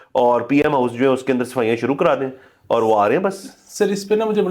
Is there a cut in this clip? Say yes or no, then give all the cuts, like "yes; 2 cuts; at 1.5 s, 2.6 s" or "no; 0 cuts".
no; 0 cuts